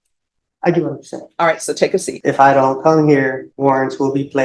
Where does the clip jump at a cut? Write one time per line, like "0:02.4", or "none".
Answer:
0:02.1
0:03.5